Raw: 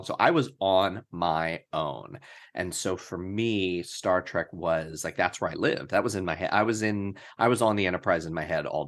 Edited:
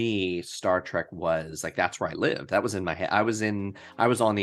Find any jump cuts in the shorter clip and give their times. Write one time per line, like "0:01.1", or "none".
none